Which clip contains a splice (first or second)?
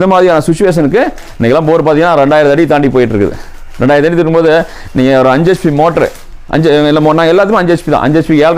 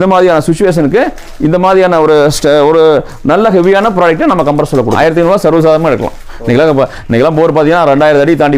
first